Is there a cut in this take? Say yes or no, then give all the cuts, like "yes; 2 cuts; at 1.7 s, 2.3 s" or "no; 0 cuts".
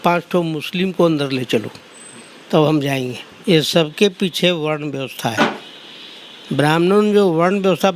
yes; 1 cut; at 3.4 s